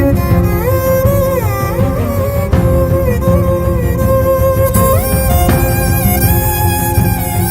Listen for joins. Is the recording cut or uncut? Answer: uncut